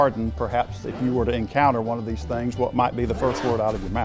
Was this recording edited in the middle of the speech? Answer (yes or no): no